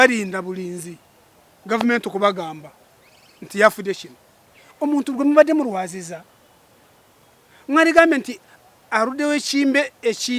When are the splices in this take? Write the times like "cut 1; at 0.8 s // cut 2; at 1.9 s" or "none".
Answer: none